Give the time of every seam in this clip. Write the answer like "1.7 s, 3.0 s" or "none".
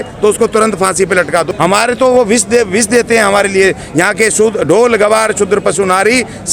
1.5 s